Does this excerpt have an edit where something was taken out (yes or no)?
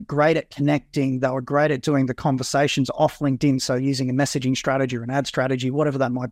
no